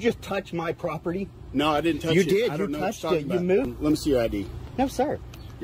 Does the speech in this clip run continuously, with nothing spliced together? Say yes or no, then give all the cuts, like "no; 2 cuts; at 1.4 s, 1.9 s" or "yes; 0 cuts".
no; 1 cut; at 3.7 s